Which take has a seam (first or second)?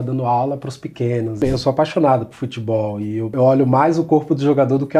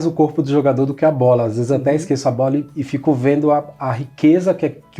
first